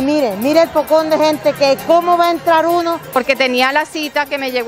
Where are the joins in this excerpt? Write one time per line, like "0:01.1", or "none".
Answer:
0:03.2